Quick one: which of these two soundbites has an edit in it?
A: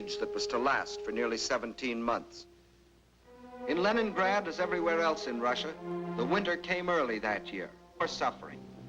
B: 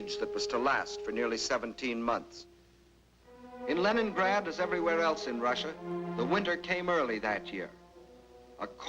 B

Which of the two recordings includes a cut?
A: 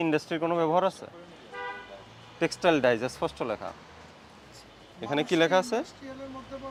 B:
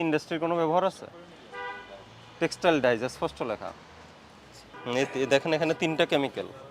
B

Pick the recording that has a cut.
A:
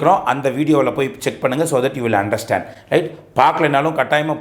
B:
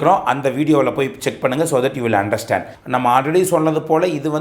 B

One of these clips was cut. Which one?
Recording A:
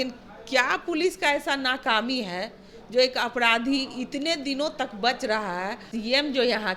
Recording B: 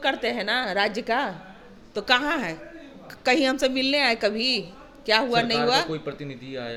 A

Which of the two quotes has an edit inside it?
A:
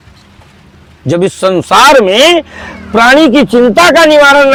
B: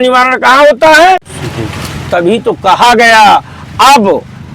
B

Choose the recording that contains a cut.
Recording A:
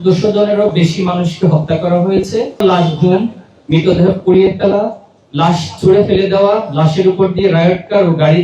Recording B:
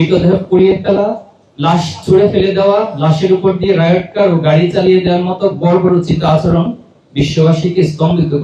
A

